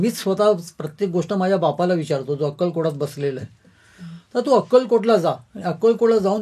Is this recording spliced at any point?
no; 0 cuts

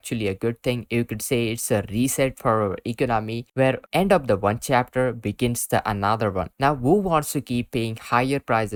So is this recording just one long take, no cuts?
yes; 0 cuts

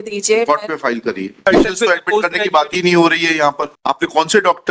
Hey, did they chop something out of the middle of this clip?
yes; 1 cut; at 1.4 s

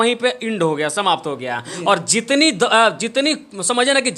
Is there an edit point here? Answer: no; 0 cuts

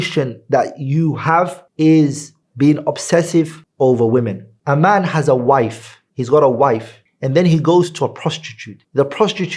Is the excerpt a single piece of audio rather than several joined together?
no; 1 cut; at 4.5 s

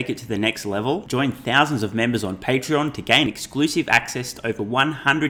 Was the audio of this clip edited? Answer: no; 0 cuts

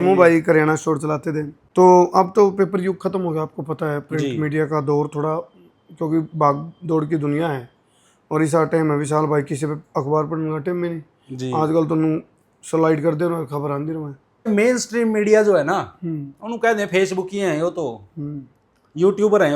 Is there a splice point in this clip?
yes; 2 cuts; at 1.5 s, 14.5 s

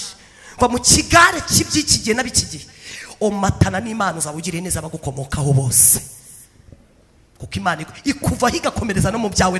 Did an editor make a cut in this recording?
no; 0 cuts

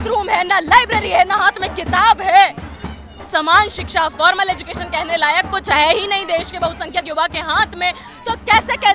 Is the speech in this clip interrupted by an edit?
no; 0 cuts

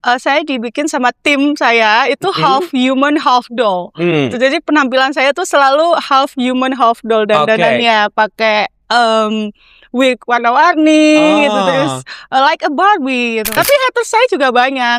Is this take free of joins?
no; 1 cut; at 13.6 s

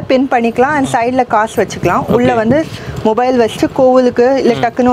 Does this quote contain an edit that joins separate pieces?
no; 0 cuts

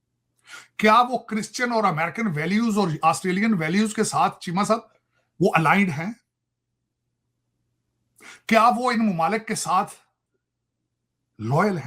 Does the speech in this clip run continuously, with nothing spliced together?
yes; 0 cuts

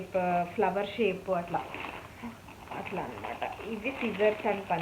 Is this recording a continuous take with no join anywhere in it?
yes; 0 cuts

